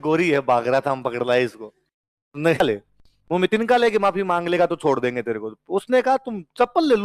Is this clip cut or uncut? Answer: cut